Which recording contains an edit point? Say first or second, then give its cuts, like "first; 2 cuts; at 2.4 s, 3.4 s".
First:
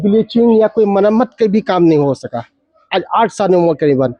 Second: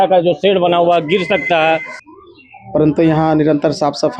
second; 1 cut; at 2.0 s